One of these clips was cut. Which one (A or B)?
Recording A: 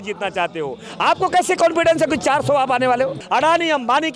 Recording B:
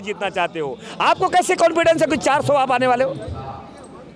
A